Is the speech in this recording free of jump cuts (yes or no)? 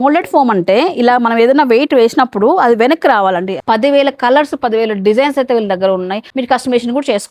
no